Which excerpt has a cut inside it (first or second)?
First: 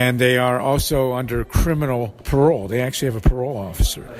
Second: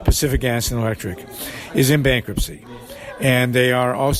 first